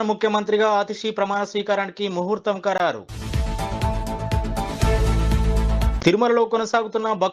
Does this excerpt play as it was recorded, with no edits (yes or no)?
yes